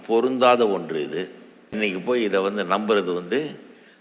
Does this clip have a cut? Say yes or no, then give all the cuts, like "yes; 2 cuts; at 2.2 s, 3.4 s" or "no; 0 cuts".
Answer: yes; 1 cut; at 1.7 s